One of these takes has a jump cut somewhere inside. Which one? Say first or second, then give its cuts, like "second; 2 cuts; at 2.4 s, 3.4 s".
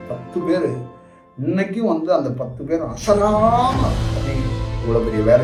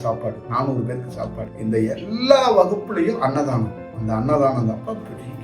second; 1 cut; at 1.4 s